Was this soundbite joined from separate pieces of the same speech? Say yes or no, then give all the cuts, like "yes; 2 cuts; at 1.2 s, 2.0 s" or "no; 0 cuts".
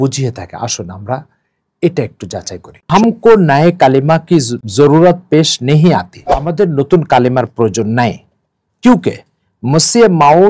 yes; 3 cuts; at 2.9 s, 4.6 s, 6.5 s